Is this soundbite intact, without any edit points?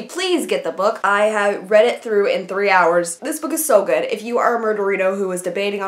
no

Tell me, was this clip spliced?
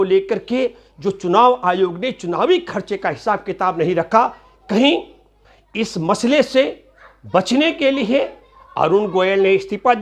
no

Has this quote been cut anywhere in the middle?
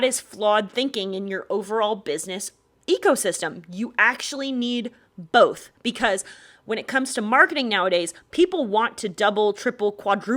no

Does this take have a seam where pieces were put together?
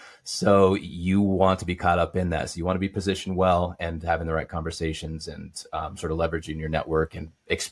no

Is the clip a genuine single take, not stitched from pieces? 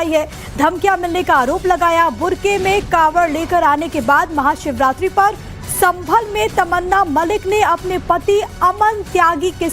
no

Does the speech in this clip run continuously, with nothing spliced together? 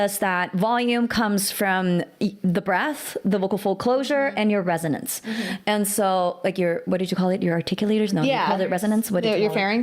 yes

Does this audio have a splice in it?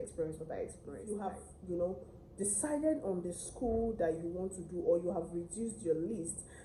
no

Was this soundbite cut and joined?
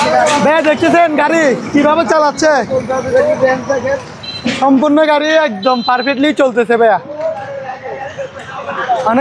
no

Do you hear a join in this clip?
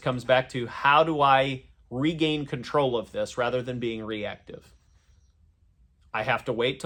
no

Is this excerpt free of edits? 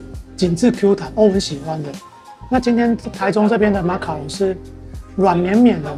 yes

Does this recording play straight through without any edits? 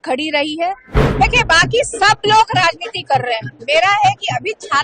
no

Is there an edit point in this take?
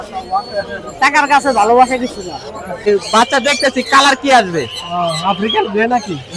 yes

